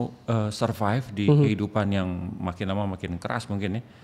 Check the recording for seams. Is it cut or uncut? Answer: uncut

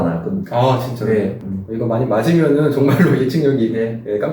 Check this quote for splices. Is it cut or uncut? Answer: cut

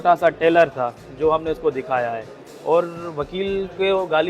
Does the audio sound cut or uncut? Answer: uncut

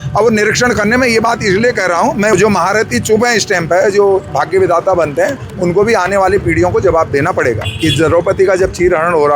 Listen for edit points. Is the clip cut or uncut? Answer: cut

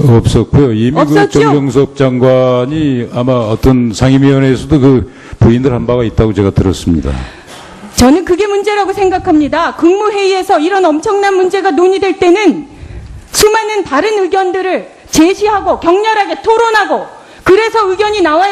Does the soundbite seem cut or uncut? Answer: uncut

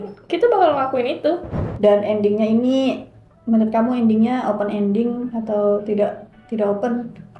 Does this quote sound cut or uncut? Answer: cut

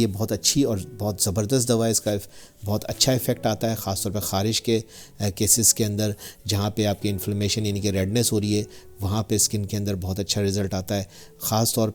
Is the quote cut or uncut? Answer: uncut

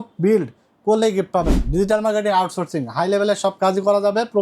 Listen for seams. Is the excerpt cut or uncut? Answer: cut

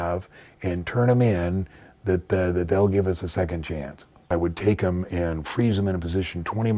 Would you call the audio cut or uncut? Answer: cut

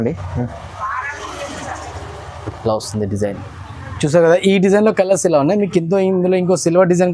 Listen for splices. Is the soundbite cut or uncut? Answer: uncut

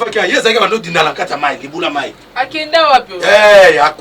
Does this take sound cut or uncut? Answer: uncut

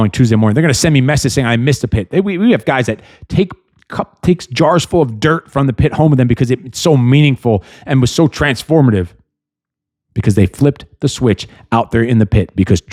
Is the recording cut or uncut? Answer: uncut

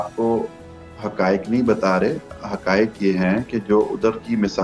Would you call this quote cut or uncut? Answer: uncut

